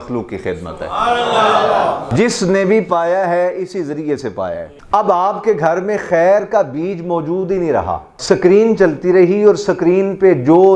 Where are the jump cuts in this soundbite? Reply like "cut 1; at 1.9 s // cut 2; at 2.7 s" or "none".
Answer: cut 1; at 2.0 s // cut 2; at 4.8 s